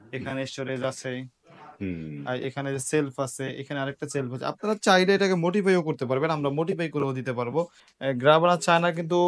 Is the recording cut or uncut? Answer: cut